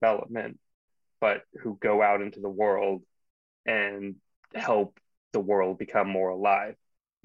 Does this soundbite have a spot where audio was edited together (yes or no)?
no